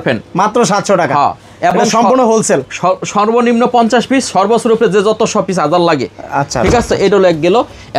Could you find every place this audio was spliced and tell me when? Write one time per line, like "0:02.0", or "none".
none

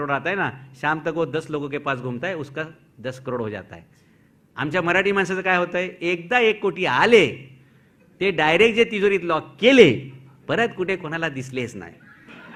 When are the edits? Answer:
none

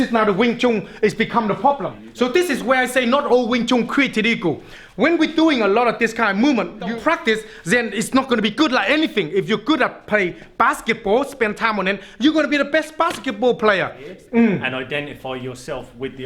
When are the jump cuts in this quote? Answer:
0:02.0
0:06.9
0:14.1

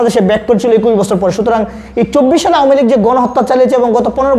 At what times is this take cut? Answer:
none

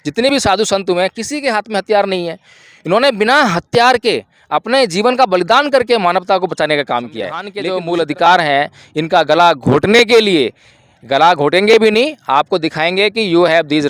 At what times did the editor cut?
0:07.6

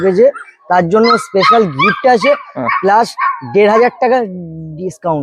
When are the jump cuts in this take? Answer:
none

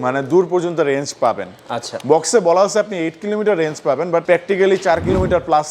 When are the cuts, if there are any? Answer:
0:04.2

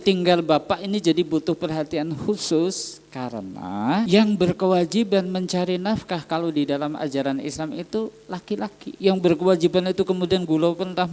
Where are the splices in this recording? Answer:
0:04.1
0:08.9

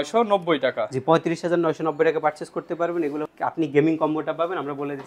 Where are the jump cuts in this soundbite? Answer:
0:03.3

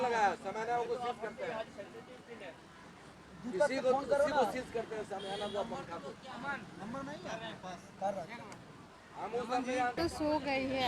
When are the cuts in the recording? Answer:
0:10.0

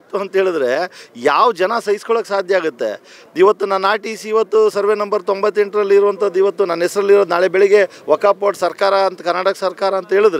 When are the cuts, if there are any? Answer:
none

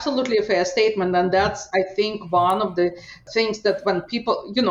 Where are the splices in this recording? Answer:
none

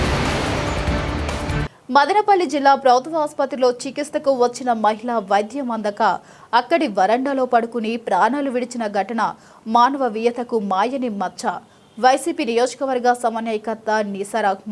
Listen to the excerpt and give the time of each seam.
0:01.6

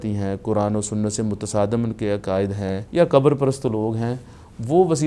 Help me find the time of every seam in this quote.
0:02.8

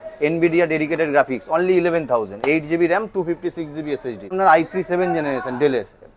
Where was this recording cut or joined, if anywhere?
0:04.3

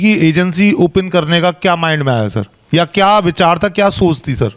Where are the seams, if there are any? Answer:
none

